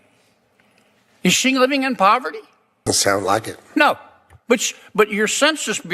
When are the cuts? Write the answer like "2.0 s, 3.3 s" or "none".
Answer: 2.8 s